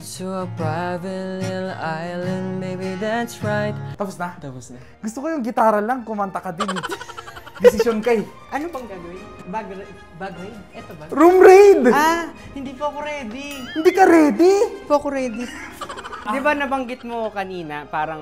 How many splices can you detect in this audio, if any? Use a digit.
3